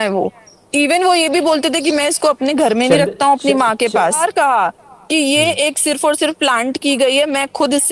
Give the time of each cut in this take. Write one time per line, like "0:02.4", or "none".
0:04.2